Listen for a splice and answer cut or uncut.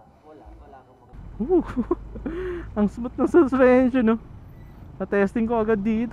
cut